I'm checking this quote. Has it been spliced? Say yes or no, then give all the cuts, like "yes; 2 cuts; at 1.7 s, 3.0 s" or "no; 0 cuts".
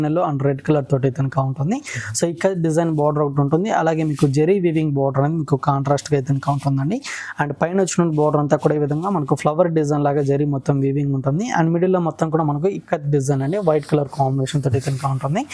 no; 0 cuts